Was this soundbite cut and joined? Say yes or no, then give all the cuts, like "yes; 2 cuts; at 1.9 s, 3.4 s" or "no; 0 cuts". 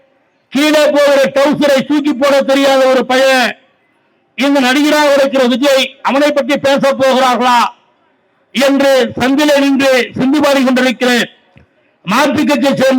no; 0 cuts